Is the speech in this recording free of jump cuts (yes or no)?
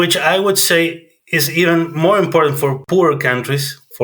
no